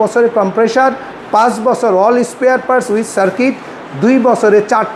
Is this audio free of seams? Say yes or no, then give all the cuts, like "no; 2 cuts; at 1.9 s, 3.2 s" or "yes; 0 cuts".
yes; 0 cuts